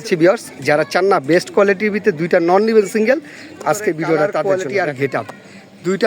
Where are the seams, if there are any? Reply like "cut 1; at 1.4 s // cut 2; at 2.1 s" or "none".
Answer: cut 1; at 4.4 s